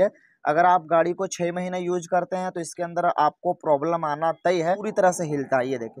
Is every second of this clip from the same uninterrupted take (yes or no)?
no